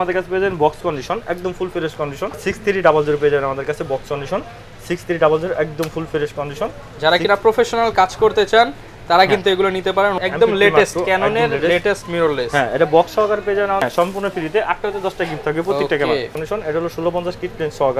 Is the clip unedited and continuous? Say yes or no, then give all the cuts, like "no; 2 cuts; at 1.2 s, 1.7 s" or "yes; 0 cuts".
no; 4 cuts; at 2.4 s, 10.2 s, 13.8 s, 16.4 s